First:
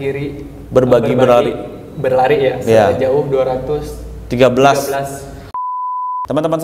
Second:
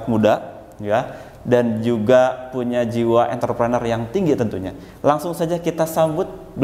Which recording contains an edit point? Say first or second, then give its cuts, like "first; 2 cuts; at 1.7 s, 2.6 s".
first; 1 cut; at 5.6 s